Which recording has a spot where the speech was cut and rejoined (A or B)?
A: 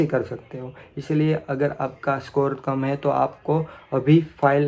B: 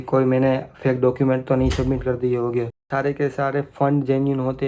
B